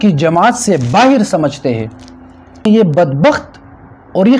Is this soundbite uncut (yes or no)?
no